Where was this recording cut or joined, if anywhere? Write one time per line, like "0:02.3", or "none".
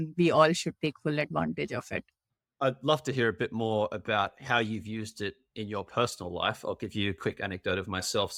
none